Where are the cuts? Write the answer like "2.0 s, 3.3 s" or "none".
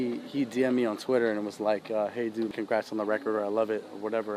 2.5 s